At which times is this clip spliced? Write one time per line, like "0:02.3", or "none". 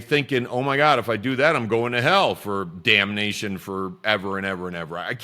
none

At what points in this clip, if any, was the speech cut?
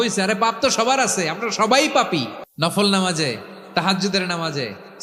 0:02.4

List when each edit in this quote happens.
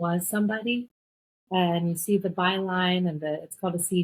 none

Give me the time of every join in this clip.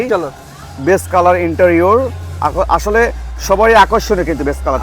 none

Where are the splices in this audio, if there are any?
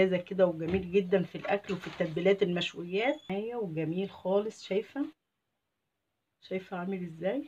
0:03.3

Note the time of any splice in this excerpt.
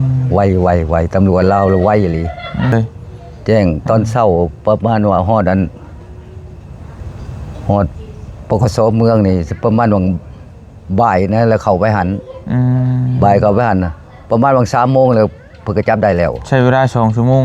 0:02.7

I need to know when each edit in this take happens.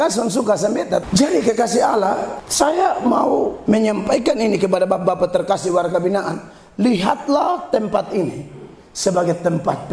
0:01.0
0:02.4
0:03.6

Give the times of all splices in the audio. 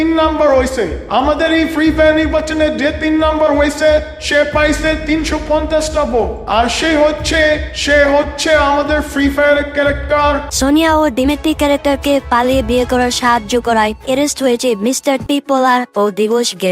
0:10.5

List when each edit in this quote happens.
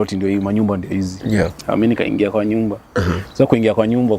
none

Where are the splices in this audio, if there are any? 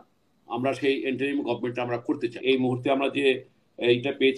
0:02.4

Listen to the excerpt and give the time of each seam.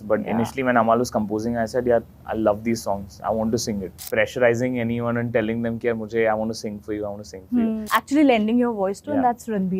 0:04.0
0:07.8

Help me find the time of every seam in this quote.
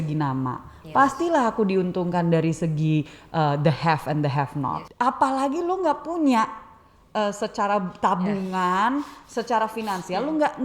0:04.8

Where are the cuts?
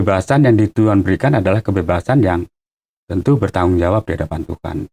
none

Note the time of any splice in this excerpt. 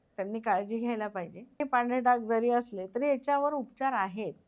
0:01.6

